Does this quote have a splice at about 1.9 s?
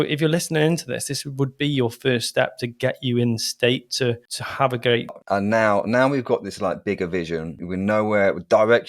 no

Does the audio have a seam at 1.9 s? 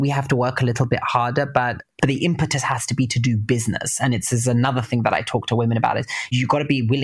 yes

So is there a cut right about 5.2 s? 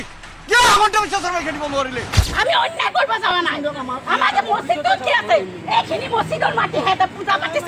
no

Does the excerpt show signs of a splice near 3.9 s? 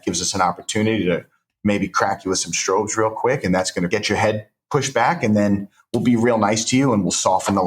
yes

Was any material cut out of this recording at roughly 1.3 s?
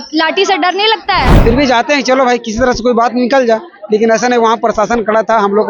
yes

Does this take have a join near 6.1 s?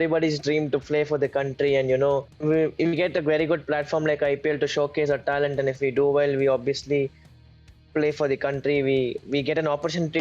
no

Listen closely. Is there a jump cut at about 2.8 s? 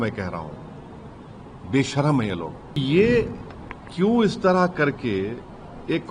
yes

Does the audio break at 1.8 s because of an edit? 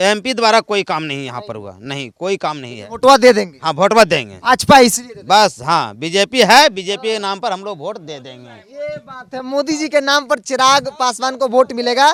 no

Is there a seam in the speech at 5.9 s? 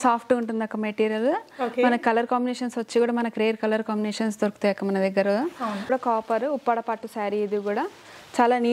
yes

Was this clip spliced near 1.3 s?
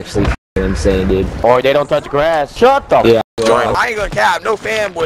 yes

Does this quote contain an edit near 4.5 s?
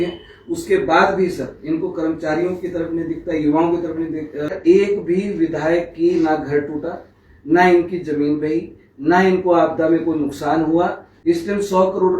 yes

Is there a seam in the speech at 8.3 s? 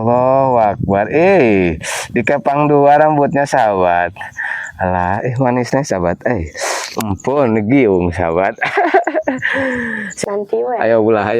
no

